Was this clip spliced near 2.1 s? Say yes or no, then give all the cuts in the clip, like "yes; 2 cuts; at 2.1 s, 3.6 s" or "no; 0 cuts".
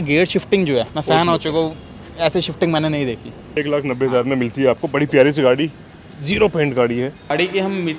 no; 3 cuts; at 0.9 s, 3.4 s, 7.3 s